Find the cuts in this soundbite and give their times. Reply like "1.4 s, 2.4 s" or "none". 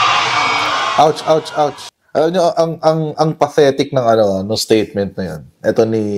1.9 s